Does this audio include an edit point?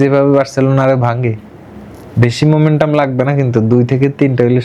no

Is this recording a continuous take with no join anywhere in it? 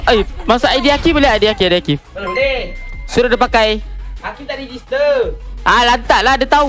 yes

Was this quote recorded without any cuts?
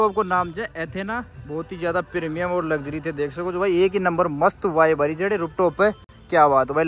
yes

